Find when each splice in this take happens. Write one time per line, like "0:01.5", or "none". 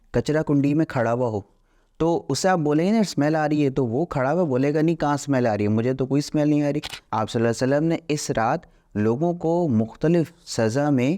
0:07.0